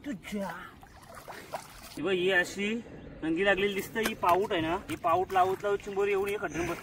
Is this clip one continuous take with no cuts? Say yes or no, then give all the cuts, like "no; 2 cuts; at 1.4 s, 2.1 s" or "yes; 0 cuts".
no; 2 cuts; at 1.8 s, 4.9 s